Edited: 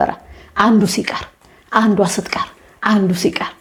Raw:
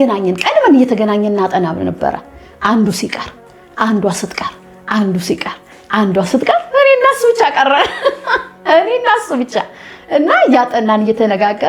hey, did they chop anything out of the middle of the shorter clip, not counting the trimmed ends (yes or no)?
no